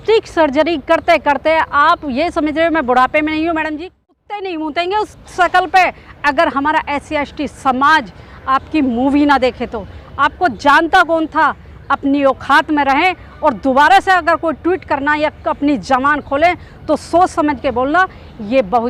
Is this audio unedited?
yes; 0 cuts

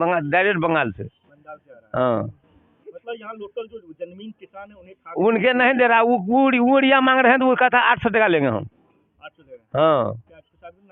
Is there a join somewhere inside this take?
no; 0 cuts

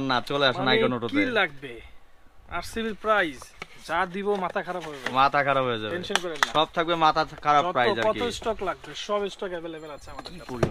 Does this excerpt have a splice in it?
no; 0 cuts

